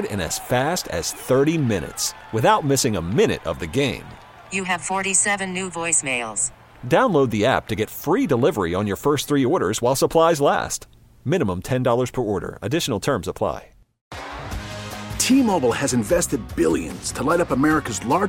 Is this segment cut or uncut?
cut